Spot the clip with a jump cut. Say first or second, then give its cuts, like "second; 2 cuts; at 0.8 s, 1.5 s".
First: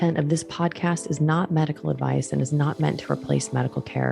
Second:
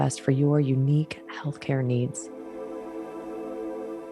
second; 1 cut; at 2.2 s